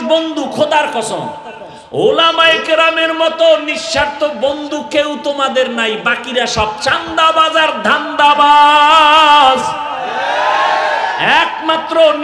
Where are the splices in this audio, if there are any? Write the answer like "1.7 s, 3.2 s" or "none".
none